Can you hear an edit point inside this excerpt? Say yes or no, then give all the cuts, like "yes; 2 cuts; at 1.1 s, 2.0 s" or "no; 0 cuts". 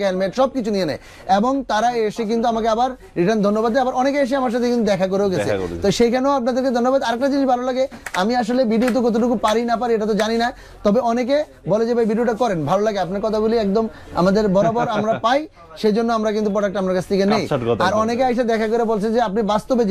no; 0 cuts